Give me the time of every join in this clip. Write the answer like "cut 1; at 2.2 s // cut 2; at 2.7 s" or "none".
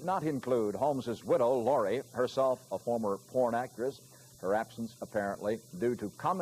none